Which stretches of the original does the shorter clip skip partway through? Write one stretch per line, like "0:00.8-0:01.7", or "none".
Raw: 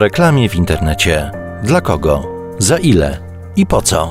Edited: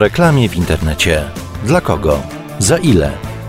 none